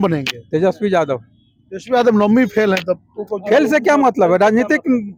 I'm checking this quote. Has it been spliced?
no; 0 cuts

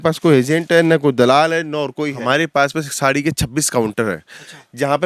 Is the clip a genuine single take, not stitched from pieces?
no; 1 cut; at 2.2 s

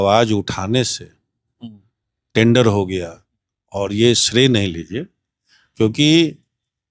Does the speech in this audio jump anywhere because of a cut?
no; 0 cuts

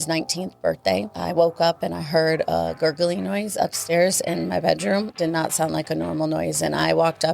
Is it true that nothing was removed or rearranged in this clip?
no; 2 cuts; at 1.1 s, 5.1 s

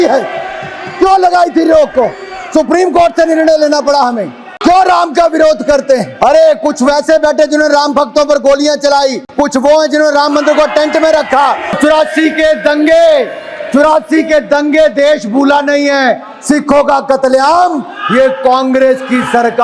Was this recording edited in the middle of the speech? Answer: yes; 4 cuts; at 4.5 s, 6.1 s, 9.2 s, 11.8 s

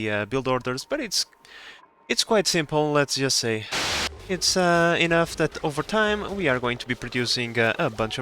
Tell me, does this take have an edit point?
yes; 1 cut; at 3.7 s

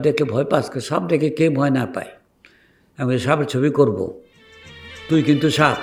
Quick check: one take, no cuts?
yes; 0 cuts

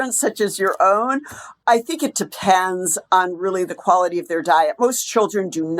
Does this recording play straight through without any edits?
no; 1 cut; at 1.6 s

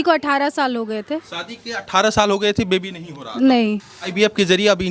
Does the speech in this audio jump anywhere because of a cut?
yes; 1 cut; at 4.0 s

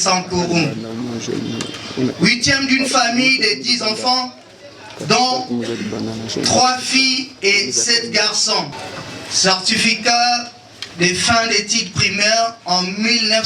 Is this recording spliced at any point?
yes; 1 cut; at 8.8 s

